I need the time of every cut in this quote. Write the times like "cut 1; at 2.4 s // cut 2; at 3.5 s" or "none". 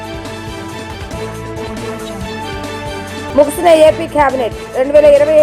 cut 1; at 1.1 s // cut 2; at 3.3 s